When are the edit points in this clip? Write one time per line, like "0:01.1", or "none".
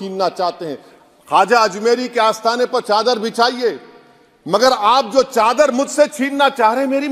none